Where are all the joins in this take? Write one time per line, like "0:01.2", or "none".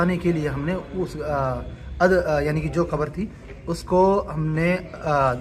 none